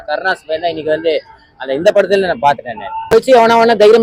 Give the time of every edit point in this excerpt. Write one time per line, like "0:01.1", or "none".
0:03.1